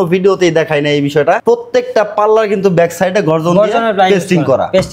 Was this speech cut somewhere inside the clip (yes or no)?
no